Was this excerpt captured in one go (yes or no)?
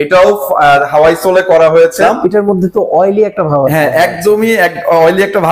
no